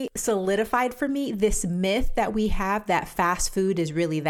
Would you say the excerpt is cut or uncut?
uncut